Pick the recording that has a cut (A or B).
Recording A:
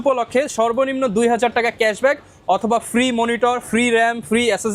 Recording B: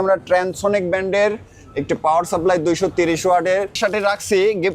B